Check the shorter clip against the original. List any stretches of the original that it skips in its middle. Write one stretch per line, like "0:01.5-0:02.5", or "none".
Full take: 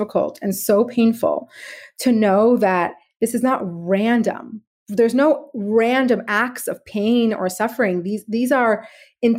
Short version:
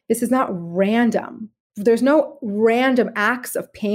none